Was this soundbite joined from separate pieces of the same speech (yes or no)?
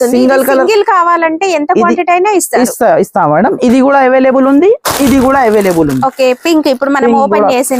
no